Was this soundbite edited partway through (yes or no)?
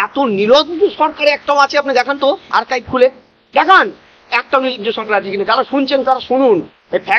no